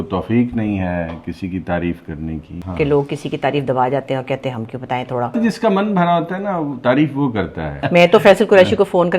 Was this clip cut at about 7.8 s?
yes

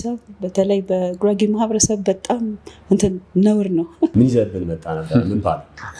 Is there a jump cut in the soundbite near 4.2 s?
yes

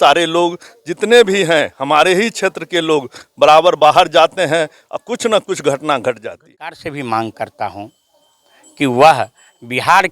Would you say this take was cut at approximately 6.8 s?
yes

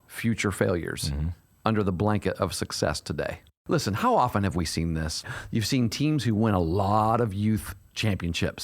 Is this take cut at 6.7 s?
no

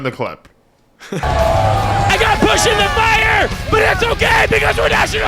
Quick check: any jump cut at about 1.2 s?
yes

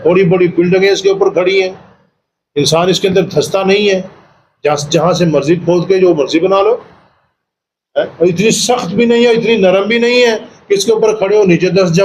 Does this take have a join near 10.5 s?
no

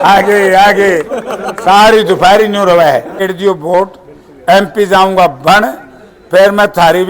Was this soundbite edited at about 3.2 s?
yes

